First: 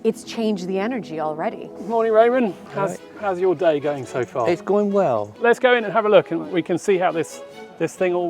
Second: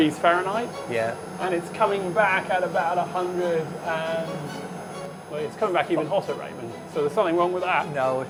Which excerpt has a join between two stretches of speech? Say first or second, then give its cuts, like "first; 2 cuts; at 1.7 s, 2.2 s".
first; 2 cuts; at 1.7 s, 5.3 s